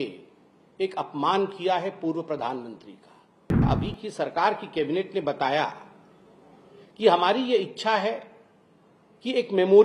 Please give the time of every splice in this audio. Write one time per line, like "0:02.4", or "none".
0:03.6